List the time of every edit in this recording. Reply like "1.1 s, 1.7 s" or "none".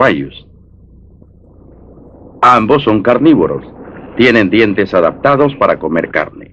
5.1 s